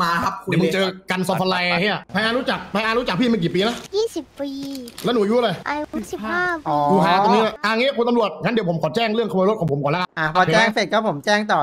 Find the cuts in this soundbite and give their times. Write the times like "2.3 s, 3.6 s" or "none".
2.0 s, 3.8 s, 5.6 s, 7.6 s, 10.1 s